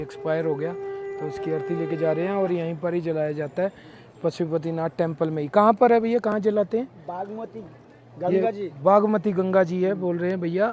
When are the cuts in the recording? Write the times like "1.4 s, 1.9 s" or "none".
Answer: none